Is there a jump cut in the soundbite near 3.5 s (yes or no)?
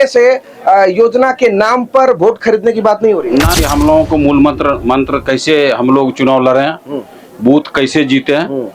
yes